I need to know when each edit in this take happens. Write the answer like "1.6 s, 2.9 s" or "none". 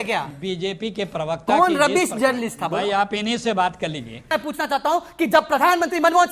4.3 s